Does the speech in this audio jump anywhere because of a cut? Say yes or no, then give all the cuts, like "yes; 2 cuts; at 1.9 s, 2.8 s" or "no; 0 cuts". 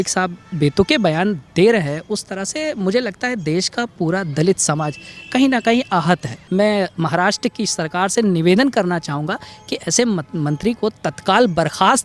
yes; 1 cut; at 6.3 s